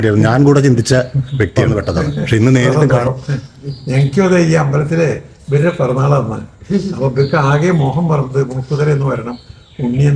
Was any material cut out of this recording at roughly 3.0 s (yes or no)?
yes